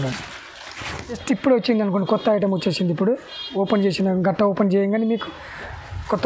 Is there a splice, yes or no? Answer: yes